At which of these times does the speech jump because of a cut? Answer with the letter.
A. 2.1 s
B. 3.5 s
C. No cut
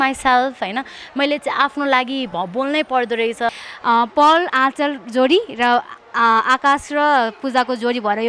B